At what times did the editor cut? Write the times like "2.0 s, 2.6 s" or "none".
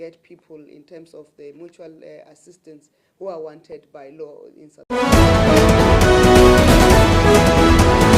4.7 s